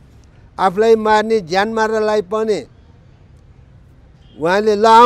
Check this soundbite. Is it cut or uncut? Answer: uncut